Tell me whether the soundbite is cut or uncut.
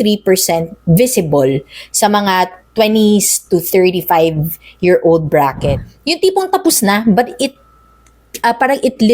cut